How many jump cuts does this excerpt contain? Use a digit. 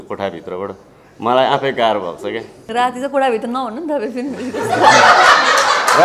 1